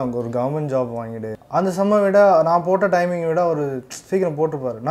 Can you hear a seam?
yes; 1 cut; at 1.3 s

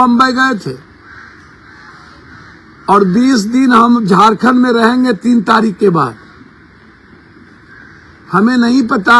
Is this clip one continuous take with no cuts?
yes; 0 cuts

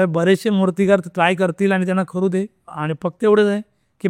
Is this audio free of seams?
yes; 0 cuts

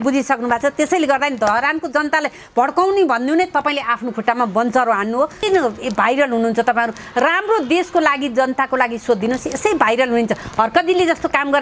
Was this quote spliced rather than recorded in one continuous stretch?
yes; 1 cut; at 5.4 s

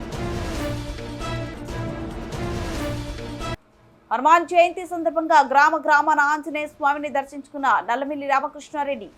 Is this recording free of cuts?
no; 1 cut; at 3.1 s

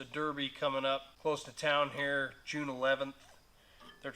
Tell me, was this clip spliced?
yes; 1 cut; at 1.1 s

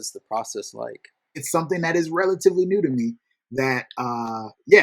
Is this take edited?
yes; 1 cut; at 1.4 s

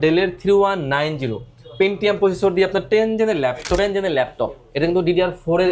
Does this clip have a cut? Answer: yes; 1 cut; at 3.8 s

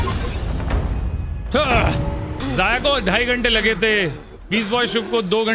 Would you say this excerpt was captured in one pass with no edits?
no; 1 cut; at 2.4 s

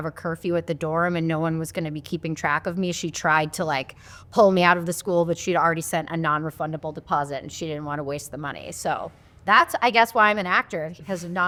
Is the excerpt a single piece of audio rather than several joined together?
yes; 0 cuts

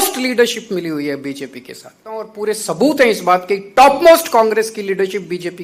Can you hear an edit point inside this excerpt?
yes; 1 cut; at 2.3 s

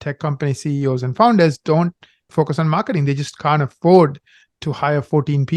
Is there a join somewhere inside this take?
yes; 1 cut; at 2.3 s

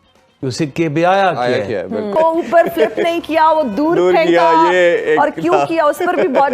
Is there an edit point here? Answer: yes; 1 cut; at 2.1 s

